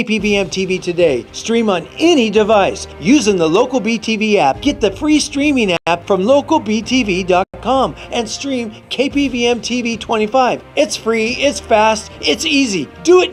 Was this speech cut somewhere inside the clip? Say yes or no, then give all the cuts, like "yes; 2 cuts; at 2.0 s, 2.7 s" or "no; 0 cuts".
no; 0 cuts